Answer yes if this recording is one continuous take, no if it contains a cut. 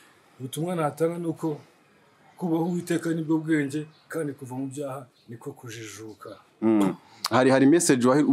yes